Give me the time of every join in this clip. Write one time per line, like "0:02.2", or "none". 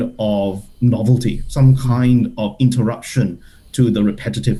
none